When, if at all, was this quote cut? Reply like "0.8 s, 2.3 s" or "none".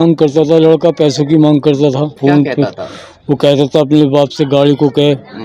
2.2 s